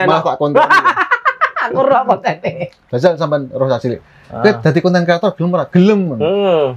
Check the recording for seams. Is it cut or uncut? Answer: cut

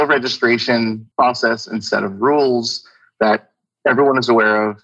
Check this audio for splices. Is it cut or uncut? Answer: cut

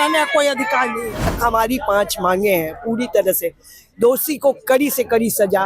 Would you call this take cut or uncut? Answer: cut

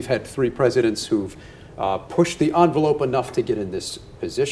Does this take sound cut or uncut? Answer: uncut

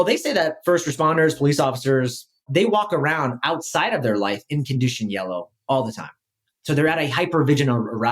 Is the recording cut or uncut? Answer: cut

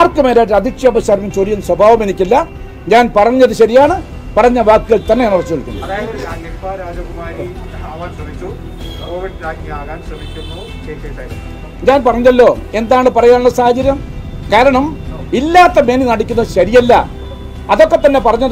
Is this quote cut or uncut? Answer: uncut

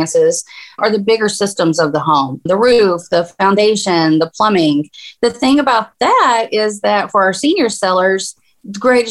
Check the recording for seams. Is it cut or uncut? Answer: uncut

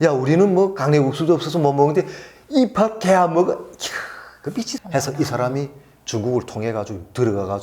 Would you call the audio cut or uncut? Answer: cut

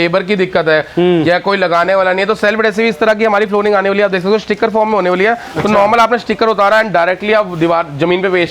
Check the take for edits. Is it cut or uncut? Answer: uncut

